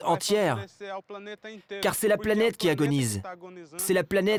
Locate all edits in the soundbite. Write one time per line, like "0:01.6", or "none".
none